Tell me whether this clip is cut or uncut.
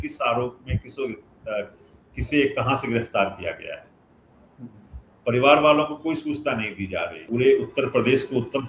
cut